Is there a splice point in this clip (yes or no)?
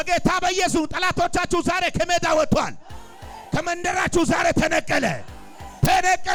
no